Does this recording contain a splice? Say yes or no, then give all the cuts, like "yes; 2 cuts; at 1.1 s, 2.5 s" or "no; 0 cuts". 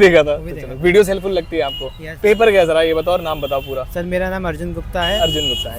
no; 0 cuts